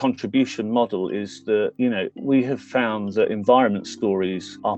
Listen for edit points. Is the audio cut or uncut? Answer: uncut